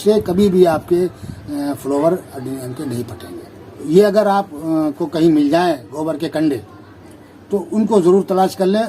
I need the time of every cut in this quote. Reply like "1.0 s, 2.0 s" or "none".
3.8 s